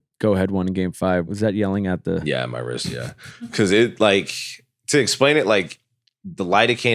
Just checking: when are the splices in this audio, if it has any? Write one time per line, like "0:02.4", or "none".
0:01.3

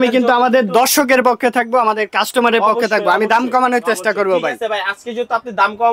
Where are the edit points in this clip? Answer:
none

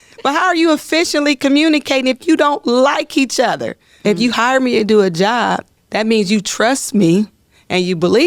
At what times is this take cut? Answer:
0:04.0
0:05.8

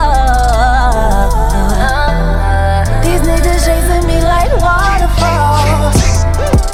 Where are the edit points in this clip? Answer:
none

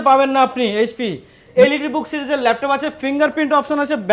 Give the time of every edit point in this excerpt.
0:01.4

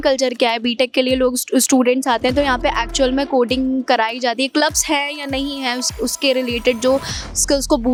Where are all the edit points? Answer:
none

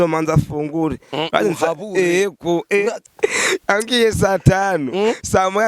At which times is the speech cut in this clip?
0:03.1

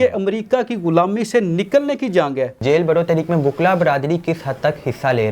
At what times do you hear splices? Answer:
0:02.6

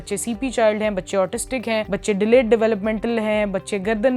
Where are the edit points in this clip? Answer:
0:01.9

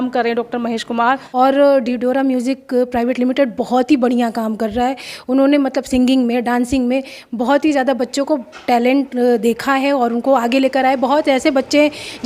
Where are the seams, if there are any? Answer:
0:01.2

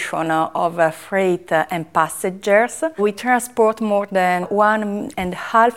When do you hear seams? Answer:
0:03.0
0:04.5

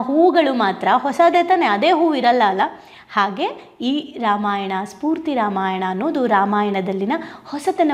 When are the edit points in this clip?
none

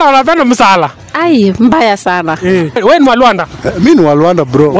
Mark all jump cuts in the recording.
0:02.8

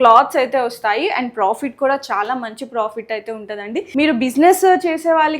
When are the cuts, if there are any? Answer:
0:03.9

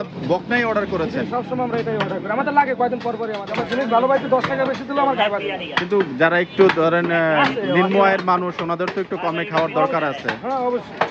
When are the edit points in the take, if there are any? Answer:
0:03.5

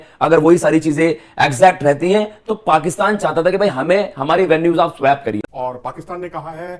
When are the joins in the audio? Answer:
0:05.4

